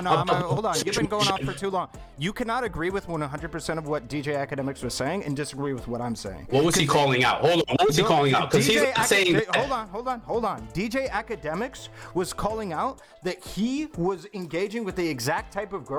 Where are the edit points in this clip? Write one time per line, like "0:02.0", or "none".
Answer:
none